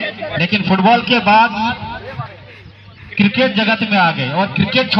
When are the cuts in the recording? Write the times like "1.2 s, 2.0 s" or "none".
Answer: none